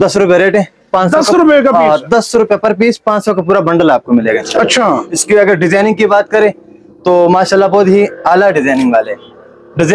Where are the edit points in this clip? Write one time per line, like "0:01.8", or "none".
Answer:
none